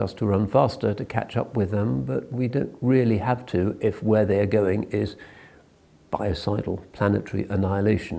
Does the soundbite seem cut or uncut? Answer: uncut